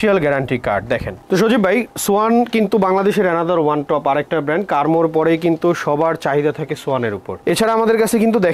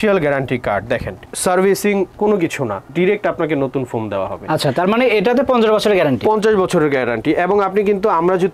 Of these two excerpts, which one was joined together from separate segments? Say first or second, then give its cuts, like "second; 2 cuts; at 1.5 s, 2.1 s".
first; 2 cuts; at 1.1 s, 7.3 s